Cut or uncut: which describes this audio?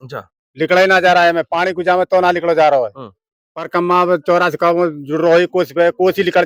uncut